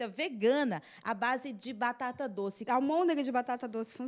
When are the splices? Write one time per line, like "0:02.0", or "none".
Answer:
0:02.6